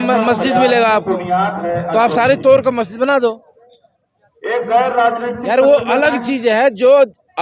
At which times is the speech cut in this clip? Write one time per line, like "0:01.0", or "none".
none